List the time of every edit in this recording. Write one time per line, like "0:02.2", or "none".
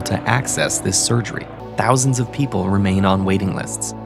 0:01.6